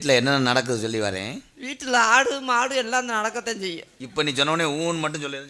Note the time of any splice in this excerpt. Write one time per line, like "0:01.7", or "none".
none